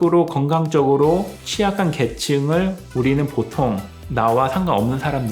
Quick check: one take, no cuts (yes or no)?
no